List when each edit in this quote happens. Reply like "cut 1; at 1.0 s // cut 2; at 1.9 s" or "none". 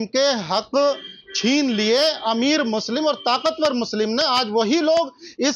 none